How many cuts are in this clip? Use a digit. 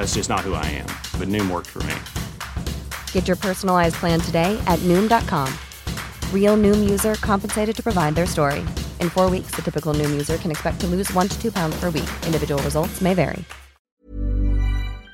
1